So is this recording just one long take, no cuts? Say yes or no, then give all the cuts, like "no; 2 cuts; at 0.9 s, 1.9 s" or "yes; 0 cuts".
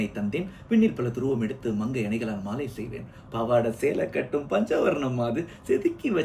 yes; 0 cuts